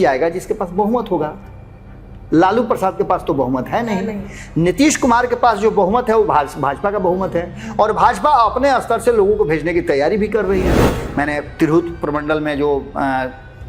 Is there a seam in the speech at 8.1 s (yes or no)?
no